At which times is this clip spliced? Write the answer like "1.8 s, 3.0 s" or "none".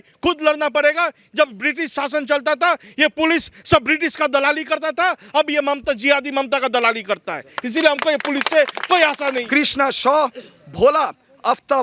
9.4 s